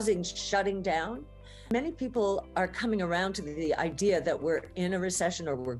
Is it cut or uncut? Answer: cut